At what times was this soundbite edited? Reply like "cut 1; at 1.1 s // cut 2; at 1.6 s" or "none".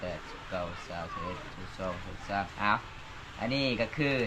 cut 1; at 2.5 s